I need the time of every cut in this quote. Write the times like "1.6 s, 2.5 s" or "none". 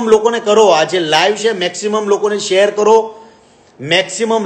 none